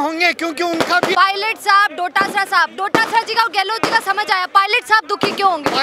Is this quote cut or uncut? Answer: cut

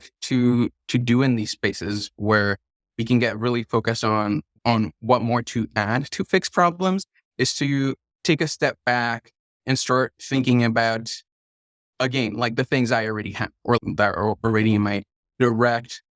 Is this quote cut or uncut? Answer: cut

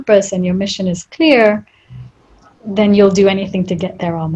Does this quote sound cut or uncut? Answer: uncut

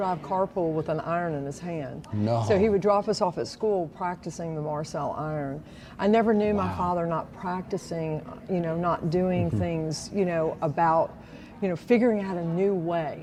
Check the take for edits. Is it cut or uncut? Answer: uncut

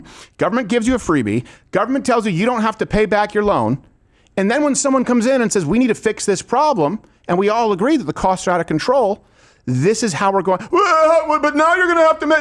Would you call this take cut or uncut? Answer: uncut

